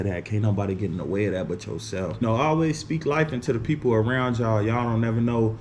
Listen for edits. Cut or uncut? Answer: cut